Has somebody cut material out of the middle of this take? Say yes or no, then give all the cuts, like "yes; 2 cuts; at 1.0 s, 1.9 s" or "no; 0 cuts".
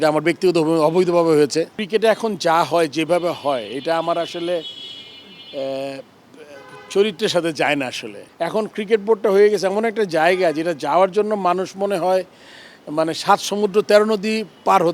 yes; 2 cuts; at 1.8 s, 8.2 s